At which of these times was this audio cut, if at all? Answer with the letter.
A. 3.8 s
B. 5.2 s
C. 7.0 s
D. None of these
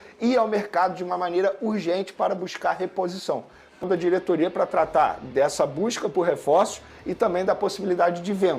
A